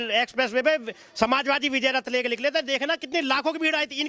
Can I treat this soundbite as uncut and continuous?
yes; 0 cuts

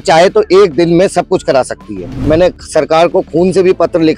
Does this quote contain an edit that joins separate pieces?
yes; 1 cut; at 2.3 s

